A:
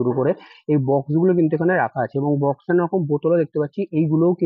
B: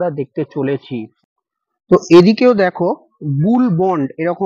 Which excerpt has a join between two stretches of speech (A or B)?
B